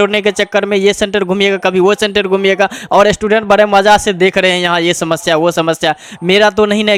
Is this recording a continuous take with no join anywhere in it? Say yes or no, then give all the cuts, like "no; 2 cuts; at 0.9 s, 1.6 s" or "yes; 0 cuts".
yes; 0 cuts